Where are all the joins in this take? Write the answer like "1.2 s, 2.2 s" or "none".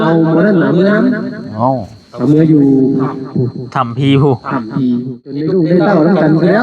5.4 s